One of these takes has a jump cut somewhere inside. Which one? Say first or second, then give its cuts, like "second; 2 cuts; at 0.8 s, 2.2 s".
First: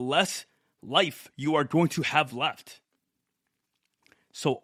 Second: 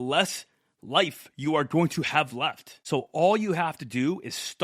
second; 1 cut; at 2.7 s